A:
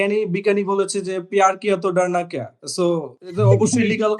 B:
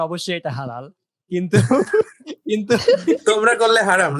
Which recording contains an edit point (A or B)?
A